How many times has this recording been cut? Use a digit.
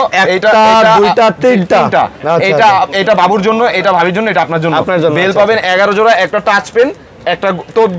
0